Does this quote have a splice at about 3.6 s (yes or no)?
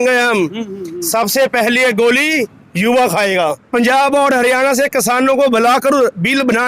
yes